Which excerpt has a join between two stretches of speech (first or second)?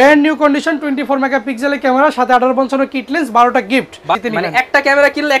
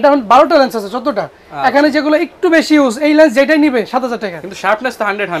first